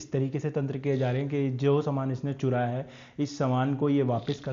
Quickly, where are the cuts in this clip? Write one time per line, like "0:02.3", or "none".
none